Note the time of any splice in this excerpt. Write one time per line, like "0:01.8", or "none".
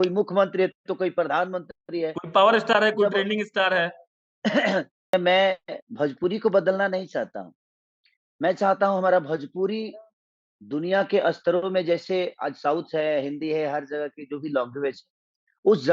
0:05.1